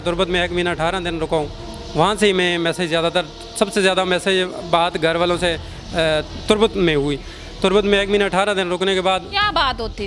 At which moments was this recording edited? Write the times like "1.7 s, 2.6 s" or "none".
none